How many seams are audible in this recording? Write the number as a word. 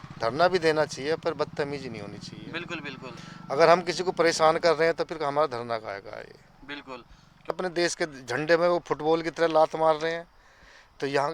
one